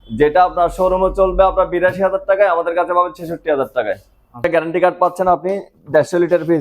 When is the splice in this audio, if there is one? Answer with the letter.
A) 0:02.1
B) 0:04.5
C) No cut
B